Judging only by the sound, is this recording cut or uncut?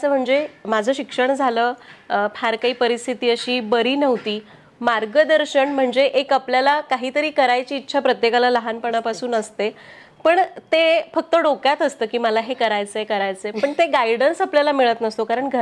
uncut